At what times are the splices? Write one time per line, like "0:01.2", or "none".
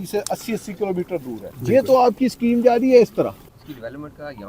0:03.5